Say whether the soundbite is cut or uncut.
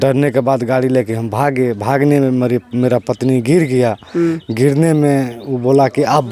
uncut